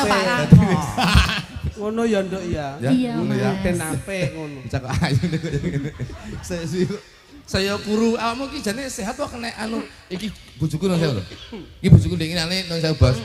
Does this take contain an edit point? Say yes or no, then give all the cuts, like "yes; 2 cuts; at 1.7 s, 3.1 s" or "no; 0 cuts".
no; 0 cuts